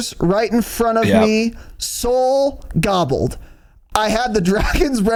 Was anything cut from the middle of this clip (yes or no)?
no